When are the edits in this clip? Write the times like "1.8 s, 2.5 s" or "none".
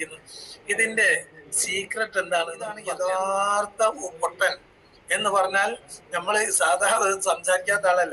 2.8 s